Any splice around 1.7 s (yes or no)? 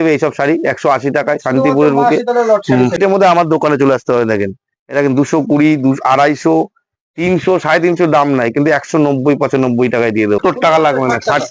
no